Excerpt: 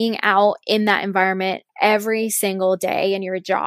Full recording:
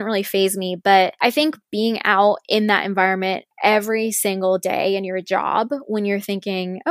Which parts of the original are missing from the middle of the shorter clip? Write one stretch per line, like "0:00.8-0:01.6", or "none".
none

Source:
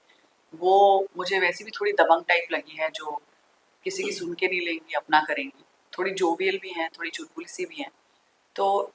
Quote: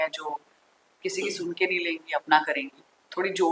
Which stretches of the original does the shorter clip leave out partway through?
none

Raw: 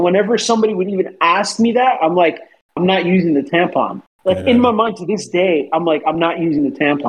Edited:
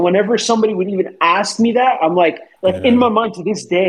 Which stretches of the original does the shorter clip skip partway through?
0:02.5-0:04.1

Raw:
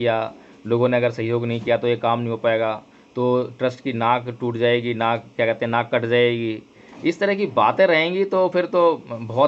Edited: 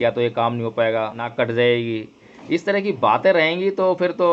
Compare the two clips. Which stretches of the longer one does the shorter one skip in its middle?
0:02.9-0:05.8

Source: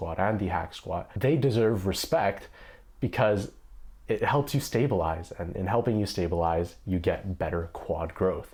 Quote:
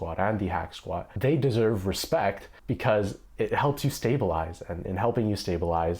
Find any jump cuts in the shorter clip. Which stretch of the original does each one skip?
0:02.5-0:02.8
0:03.5-0:03.9

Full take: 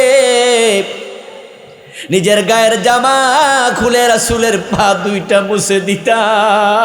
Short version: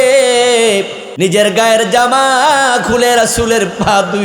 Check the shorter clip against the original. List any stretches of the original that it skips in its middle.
0:01.0-0:01.9

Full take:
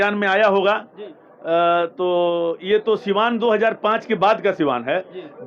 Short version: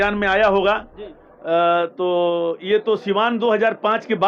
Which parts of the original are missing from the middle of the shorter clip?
none

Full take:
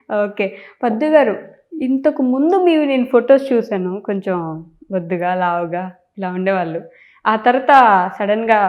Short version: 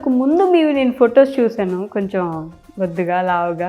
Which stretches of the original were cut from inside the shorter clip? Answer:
none

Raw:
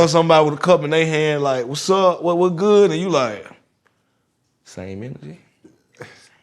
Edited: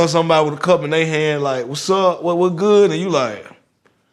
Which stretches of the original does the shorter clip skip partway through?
none

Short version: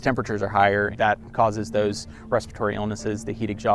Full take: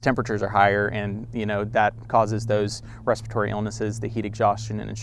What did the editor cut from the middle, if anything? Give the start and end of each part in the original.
0:00.9-0:01.7

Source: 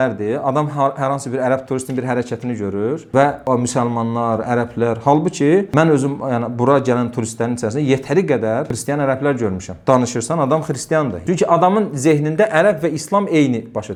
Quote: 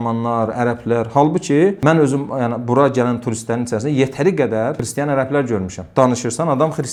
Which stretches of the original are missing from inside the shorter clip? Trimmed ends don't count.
none

